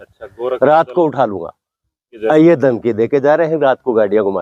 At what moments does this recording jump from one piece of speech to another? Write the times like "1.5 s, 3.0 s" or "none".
2.2 s